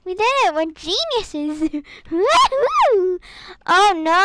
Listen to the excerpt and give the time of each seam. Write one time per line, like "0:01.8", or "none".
none